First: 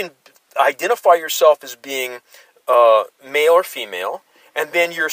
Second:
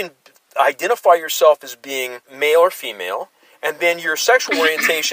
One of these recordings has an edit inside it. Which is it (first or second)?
second